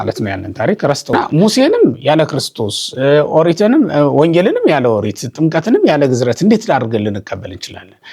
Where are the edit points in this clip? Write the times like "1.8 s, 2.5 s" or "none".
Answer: 1.1 s

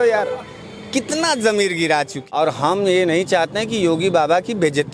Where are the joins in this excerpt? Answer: 2.2 s

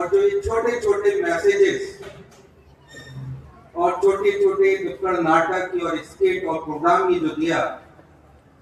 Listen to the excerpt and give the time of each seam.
none

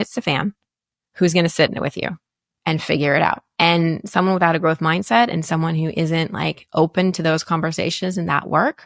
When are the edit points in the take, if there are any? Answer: 3.5 s

